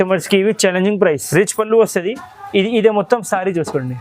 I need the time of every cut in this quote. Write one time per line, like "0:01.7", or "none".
0:01.2